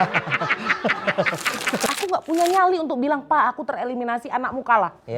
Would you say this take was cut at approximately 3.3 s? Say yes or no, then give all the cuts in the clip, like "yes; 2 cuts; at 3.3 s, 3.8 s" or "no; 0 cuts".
no; 1 cut; at 1.9 s